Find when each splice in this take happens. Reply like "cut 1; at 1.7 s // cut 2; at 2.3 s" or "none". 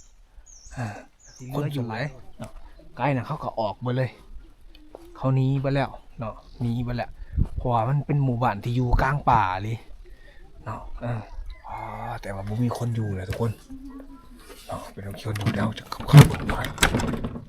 cut 1; at 1.7 s // cut 2; at 11.2 s

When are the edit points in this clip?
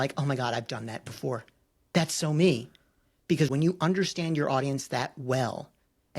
cut 1; at 3.5 s

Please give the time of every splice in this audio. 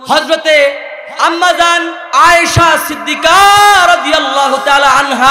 none

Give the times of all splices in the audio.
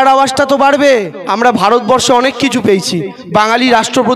cut 1; at 1.2 s

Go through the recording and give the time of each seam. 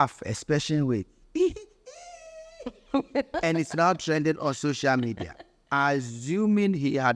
none

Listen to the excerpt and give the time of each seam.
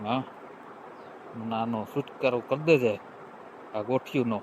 none

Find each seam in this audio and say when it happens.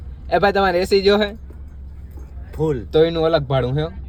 none

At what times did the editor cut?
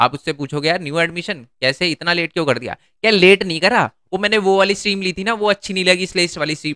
none

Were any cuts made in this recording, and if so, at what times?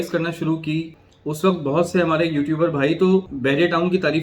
cut 1; at 0.9 s // cut 2; at 3.3 s

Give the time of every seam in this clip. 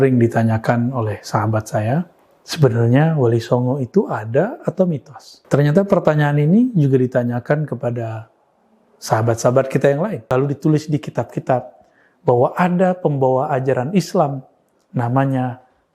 cut 1; at 10.2 s

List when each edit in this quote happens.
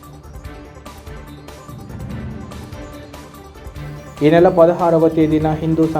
cut 1; at 1.0 s

